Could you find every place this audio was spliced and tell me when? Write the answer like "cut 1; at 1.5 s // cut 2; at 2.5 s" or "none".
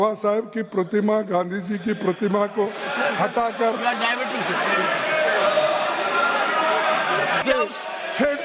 cut 1; at 7.4 s